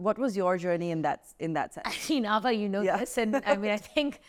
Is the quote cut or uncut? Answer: uncut